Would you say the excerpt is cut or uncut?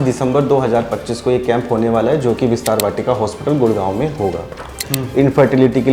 cut